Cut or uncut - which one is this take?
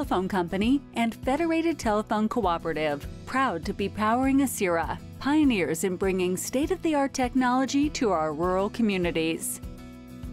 cut